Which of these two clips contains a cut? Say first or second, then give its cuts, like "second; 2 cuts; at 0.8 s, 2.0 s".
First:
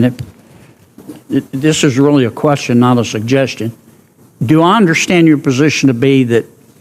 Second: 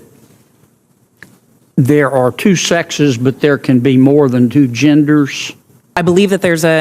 second; 1 cut; at 5.9 s